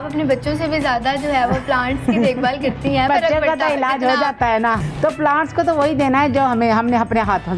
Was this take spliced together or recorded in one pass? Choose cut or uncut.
cut